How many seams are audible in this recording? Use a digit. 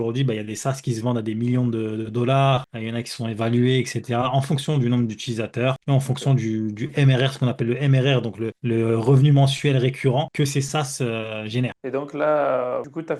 0